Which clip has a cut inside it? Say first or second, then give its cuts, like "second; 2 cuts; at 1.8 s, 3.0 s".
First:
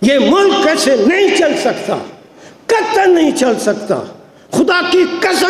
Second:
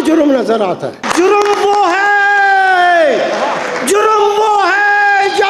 second; 1 cut; at 1.0 s